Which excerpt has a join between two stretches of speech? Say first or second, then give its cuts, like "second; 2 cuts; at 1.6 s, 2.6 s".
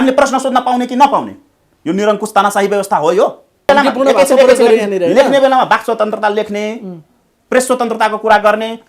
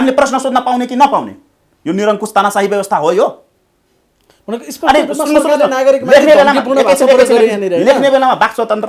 first; 1 cut; at 3.7 s